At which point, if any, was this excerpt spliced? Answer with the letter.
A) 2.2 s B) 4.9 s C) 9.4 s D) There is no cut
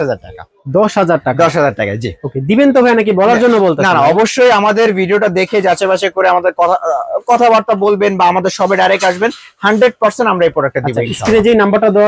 D